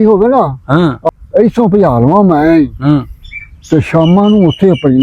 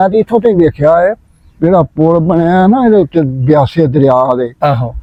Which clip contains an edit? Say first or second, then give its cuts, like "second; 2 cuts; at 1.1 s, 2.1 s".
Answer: first; 1 cut; at 1.1 s